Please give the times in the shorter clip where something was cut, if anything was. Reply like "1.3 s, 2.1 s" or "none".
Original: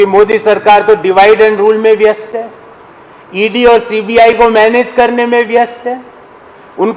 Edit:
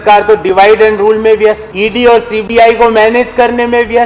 1.7 s